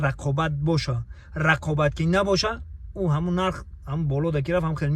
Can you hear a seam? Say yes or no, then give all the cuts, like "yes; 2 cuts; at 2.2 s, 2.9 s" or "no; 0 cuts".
no; 0 cuts